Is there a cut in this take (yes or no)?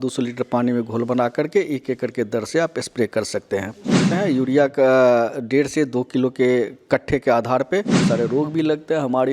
yes